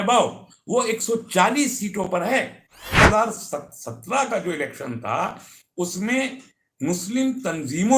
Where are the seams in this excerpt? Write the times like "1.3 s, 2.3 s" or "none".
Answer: 3.0 s